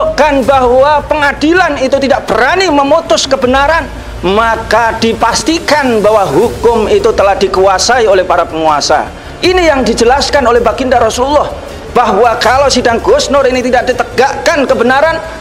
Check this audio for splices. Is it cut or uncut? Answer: cut